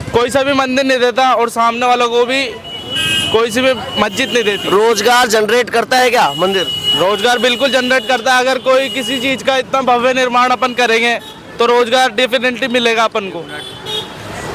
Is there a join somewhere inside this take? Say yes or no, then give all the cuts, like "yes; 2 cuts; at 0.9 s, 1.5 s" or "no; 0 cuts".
no; 0 cuts